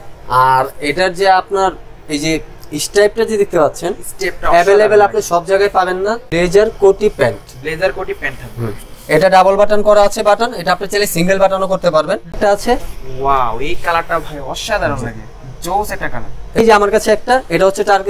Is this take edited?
yes; 3 cuts; at 6.2 s, 12.4 s, 16.6 s

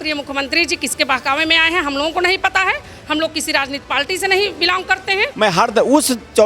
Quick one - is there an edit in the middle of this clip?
yes; 1 cut; at 5.3 s

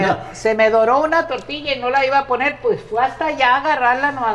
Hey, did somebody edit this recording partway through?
no; 0 cuts

